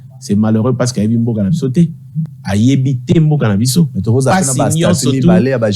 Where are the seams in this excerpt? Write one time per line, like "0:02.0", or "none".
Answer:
none